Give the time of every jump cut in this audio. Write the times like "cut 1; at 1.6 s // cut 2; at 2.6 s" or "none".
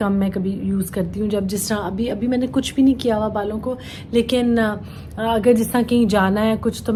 none